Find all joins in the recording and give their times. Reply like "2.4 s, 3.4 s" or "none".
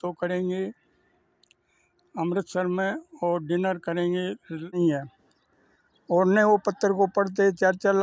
4.8 s

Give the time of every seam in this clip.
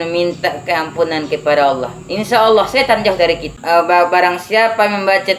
3.6 s

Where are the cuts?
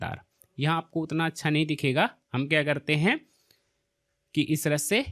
none

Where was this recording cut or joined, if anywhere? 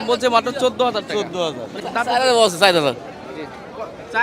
1.8 s

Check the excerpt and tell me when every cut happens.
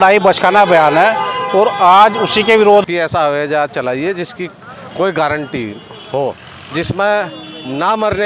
2.9 s

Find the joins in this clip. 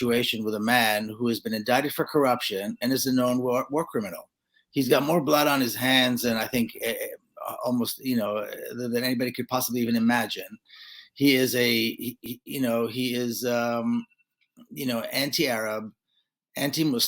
none

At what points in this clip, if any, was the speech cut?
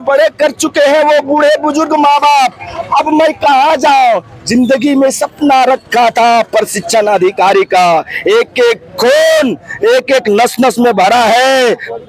none

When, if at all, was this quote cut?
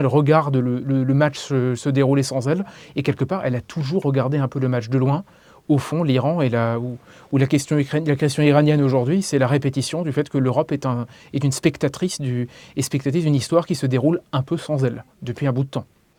none

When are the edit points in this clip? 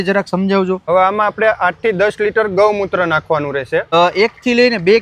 0.8 s, 3.9 s

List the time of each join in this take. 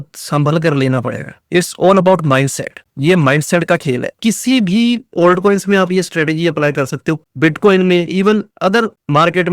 4.1 s, 7.2 s

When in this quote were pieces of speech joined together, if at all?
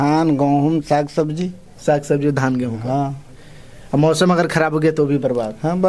none

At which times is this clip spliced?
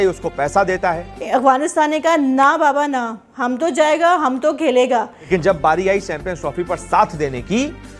1.1 s, 5.3 s

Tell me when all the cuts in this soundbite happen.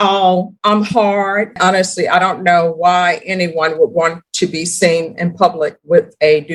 1.6 s

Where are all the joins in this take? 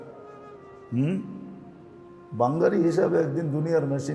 none

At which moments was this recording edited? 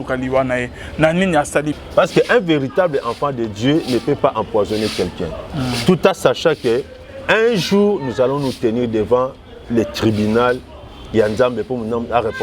1.7 s

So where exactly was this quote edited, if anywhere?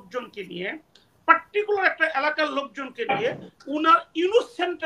none

